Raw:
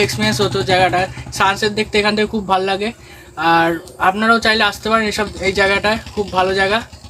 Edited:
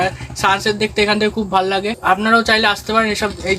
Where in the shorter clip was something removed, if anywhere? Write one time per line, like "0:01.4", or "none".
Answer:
0:01.9

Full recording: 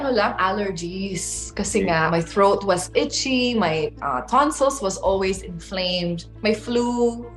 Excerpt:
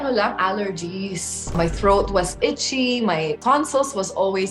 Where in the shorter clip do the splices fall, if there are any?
0:01.6
0:03.4

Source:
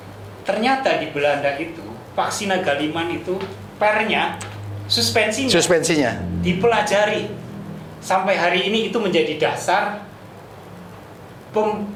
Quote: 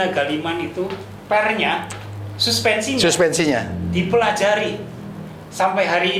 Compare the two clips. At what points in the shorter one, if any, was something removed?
none

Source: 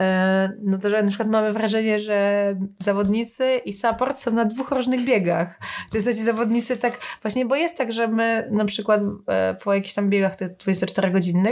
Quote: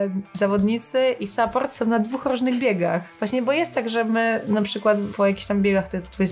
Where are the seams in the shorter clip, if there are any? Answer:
0:03.1
0:05.1

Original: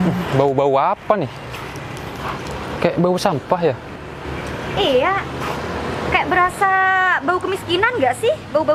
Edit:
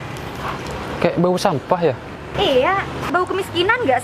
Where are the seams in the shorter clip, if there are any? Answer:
0:02.2
0:03.1

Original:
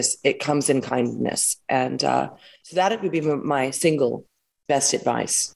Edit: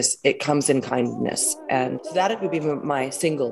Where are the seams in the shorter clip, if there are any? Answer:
0:02.0

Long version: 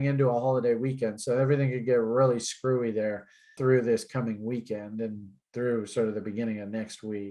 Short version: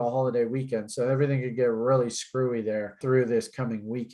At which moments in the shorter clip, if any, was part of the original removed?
0:02.9

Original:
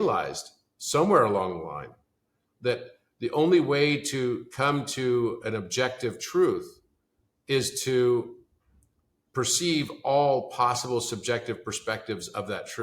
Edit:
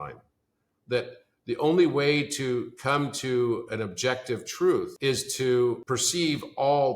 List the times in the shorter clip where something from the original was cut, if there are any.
0:04.9
0:05.8

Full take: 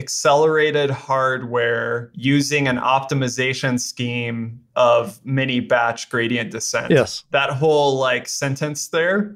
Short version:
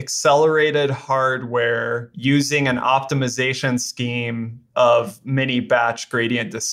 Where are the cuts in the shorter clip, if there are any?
none

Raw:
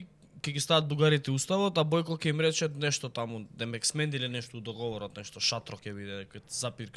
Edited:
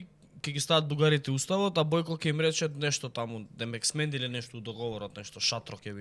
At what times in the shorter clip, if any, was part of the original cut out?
none

